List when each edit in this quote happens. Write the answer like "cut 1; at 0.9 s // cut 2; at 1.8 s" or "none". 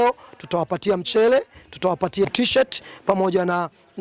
cut 1; at 2.3 s